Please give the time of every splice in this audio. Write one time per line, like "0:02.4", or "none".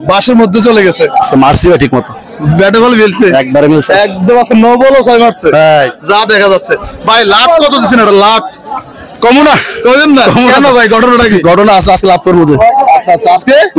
none